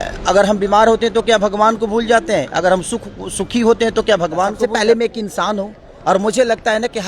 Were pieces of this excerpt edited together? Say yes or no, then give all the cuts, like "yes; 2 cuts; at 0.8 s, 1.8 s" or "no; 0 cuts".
yes; 1 cut; at 4.6 s